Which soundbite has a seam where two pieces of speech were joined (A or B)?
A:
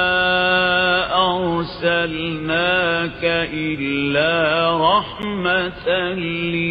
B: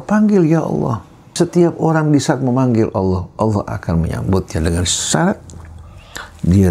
B